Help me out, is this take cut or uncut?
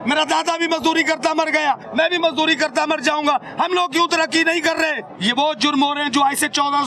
cut